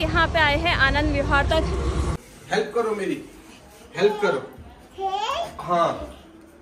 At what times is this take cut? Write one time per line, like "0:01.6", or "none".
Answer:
0:02.0

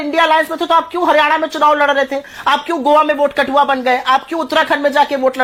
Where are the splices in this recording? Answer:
none

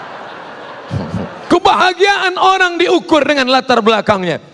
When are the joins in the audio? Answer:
0:01.4

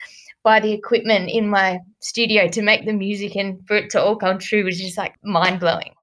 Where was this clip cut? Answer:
0:05.1

